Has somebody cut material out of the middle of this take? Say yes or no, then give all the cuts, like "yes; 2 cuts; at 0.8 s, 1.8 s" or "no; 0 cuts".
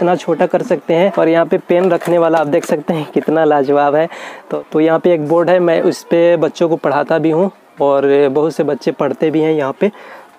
yes; 2 cuts; at 1.1 s, 4.6 s